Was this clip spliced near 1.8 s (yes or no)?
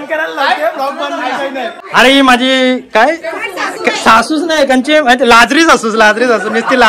yes